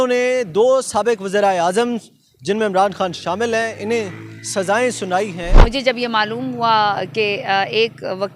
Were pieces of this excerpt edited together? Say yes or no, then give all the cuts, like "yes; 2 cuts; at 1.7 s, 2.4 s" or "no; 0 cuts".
yes; 1 cut; at 5.6 s